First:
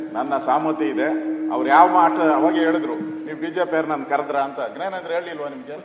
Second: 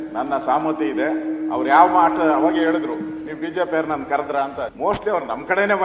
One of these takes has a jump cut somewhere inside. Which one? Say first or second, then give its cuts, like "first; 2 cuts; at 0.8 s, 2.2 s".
second; 1 cut; at 4.7 s